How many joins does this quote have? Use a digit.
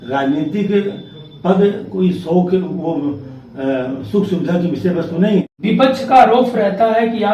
1